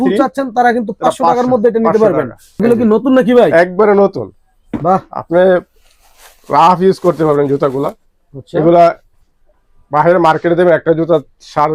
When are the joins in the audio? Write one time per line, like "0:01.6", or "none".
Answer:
none